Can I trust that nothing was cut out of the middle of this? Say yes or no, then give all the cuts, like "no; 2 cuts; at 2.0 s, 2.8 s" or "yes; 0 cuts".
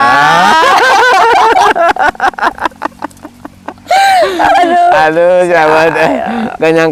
yes; 0 cuts